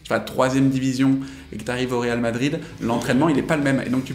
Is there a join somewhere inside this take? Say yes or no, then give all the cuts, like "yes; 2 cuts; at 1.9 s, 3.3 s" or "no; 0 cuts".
no; 0 cuts